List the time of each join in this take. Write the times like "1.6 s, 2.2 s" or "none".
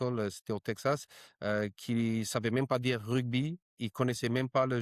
none